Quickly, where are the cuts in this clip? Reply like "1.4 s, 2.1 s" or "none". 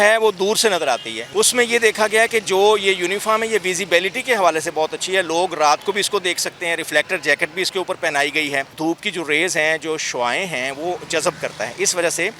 1.2 s, 8.8 s